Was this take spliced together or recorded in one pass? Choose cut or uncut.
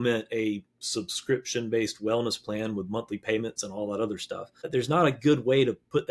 cut